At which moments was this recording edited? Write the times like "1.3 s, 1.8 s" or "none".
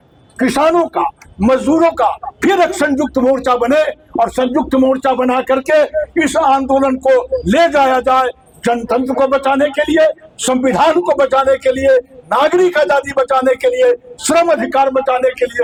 none